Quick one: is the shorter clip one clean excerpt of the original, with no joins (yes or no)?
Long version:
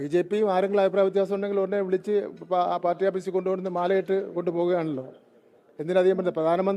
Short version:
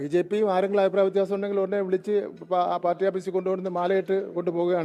yes